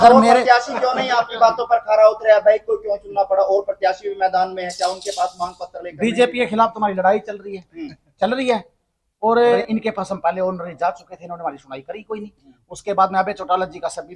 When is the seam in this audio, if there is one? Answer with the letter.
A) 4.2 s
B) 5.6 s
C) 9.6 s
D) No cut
C